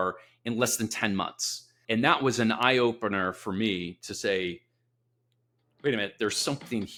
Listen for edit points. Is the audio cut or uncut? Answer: uncut